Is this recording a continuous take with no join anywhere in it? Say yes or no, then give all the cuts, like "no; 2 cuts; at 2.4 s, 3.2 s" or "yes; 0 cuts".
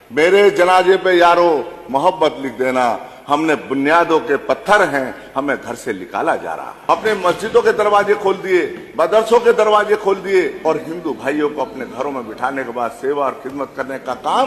no; 2 cuts; at 6.7 s, 10.6 s